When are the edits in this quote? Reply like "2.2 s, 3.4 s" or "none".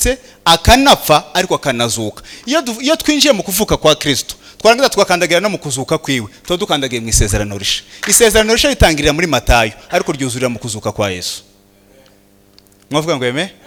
none